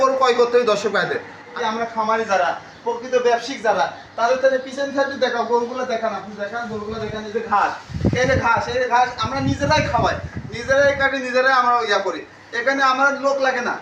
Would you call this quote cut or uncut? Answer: cut